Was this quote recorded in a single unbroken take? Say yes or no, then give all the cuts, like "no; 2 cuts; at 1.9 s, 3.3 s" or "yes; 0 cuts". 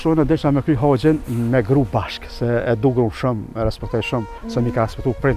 yes; 0 cuts